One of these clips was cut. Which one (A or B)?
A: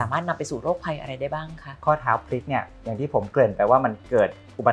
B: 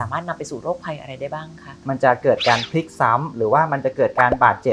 B